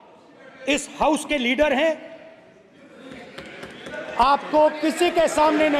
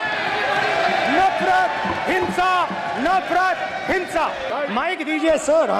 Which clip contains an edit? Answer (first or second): second